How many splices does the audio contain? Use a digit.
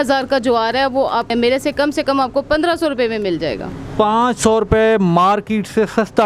1